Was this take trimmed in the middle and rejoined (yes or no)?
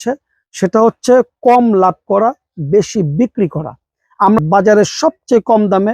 yes